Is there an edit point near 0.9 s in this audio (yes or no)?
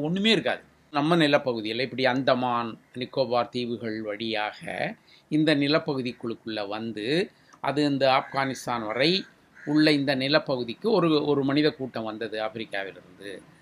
yes